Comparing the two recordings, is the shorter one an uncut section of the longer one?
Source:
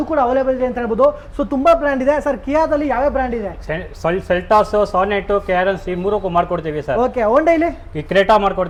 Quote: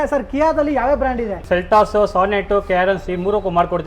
no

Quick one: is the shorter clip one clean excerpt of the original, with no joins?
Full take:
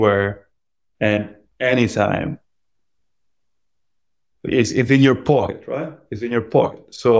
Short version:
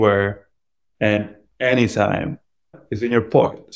no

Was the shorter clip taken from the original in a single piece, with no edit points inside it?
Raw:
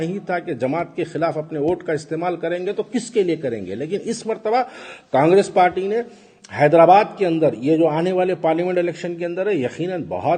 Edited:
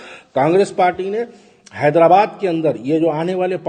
yes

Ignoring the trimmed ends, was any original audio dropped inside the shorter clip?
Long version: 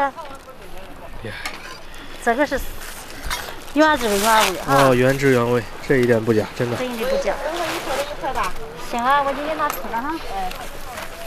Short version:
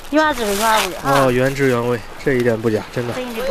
no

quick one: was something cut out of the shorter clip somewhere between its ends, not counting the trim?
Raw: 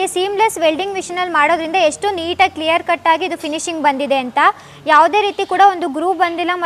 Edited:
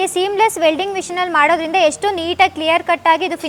no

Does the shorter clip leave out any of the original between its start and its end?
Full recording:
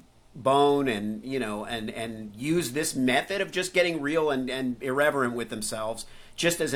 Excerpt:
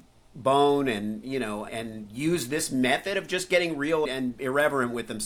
yes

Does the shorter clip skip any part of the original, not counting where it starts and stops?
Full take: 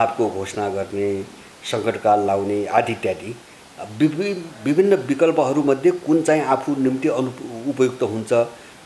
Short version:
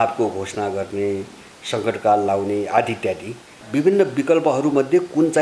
yes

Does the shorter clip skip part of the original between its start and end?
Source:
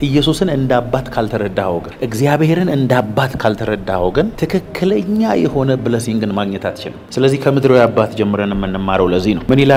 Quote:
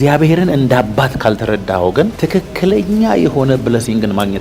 no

